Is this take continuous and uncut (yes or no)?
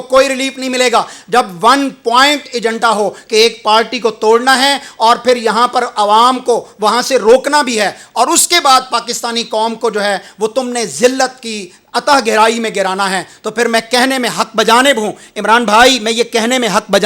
yes